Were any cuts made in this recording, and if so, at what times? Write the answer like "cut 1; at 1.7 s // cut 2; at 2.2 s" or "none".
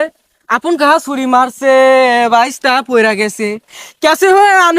none

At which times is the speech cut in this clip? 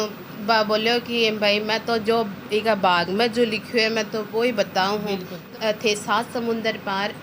cut 1; at 5.5 s

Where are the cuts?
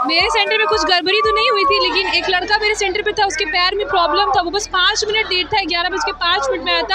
none

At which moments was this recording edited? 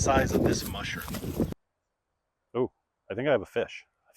cut 1; at 1.5 s

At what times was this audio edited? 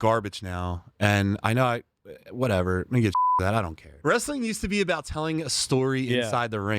cut 1; at 4.0 s

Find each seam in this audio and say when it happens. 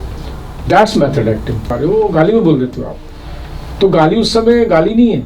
cut 1; at 1.7 s

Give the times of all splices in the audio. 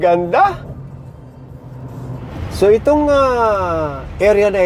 cut 1; at 2.3 s

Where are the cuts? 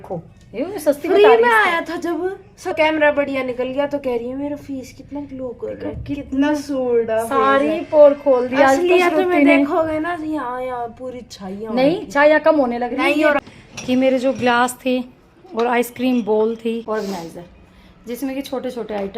cut 1; at 2.8 s // cut 2; at 13.5 s // cut 3; at 16.8 s

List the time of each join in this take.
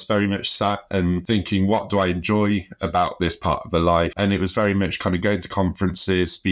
cut 1; at 1.2 s // cut 2; at 4.1 s

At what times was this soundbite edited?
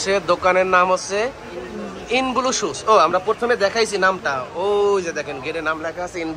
none

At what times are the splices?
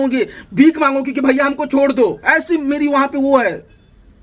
none

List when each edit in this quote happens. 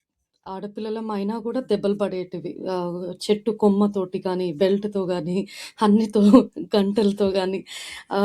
none

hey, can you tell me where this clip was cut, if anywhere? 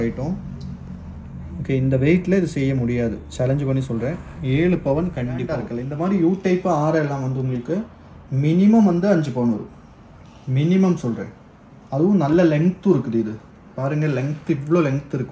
cut 1; at 5.8 s

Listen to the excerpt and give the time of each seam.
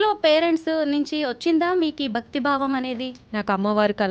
cut 1; at 3.1 s

